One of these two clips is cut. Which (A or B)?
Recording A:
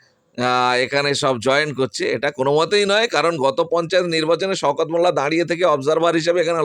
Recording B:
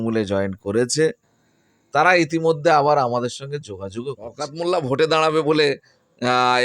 B